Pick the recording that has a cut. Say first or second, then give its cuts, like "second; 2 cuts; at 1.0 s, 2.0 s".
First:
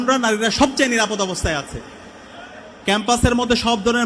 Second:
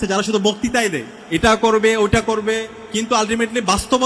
second; 2 cuts; at 1.1 s, 2.8 s